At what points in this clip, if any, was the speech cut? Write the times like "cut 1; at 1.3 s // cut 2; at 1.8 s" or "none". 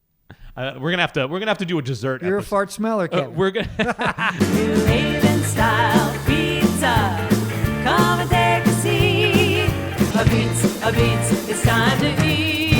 cut 1; at 4.3 s